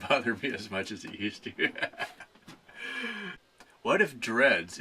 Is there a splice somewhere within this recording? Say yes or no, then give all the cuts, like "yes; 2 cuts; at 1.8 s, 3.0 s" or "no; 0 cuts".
yes; 1 cut; at 3.4 s